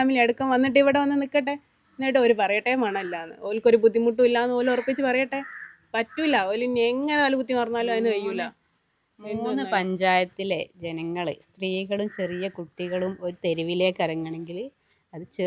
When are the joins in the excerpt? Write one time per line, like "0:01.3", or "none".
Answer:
none